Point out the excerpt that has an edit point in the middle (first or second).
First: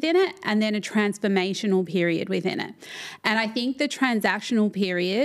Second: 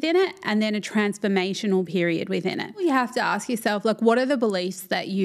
second